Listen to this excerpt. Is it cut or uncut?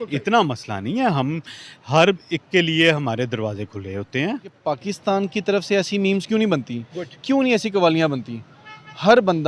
cut